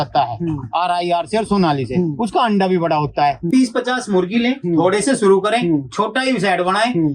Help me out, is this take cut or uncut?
cut